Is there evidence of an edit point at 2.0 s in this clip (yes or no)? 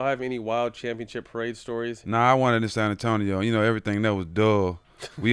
yes